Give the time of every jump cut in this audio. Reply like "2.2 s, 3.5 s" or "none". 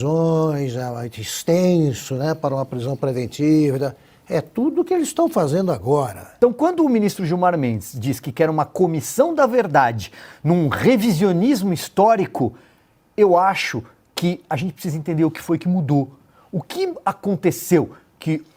6.2 s